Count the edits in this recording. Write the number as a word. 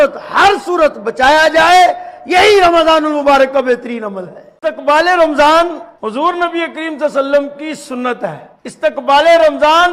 two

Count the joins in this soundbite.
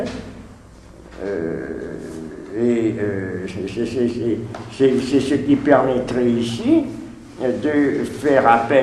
one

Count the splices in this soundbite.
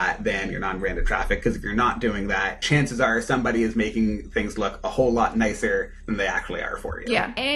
zero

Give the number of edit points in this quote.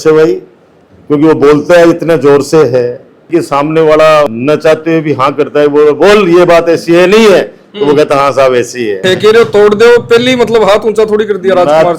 two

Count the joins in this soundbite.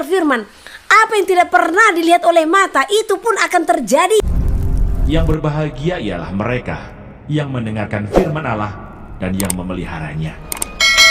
one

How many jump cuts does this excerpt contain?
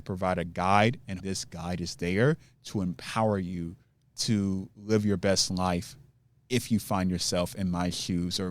one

